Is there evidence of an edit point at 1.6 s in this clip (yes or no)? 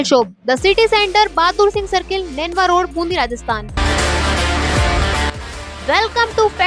no